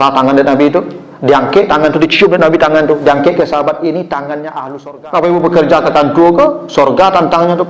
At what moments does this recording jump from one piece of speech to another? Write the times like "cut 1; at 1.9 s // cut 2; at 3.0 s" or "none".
cut 1; at 4.5 s